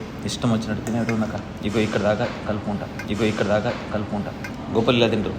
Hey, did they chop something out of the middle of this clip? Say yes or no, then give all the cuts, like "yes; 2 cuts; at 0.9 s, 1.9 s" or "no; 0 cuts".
yes; 1 cut; at 4.4 s